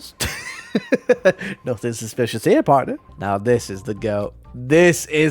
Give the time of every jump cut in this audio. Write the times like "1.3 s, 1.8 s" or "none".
3.0 s

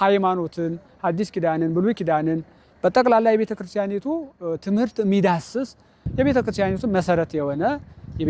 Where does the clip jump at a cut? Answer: none

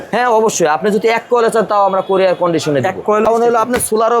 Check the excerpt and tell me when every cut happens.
3.3 s

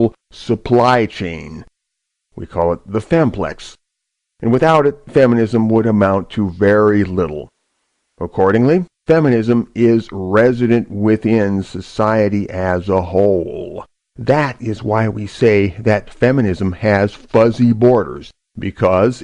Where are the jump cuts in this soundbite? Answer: 3.9 s

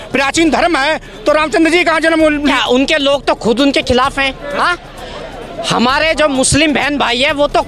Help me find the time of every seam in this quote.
2.5 s

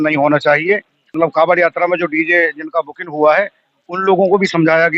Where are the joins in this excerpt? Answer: 1.1 s

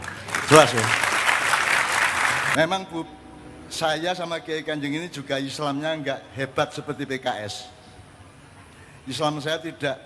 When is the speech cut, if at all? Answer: 2.5 s

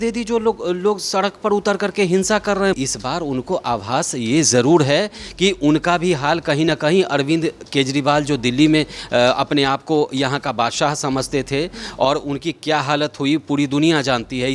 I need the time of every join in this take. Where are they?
2.8 s

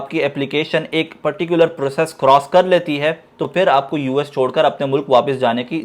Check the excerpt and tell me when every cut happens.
none

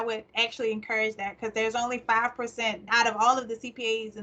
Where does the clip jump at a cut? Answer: 2.8 s

